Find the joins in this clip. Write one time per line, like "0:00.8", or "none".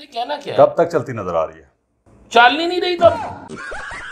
0:03.2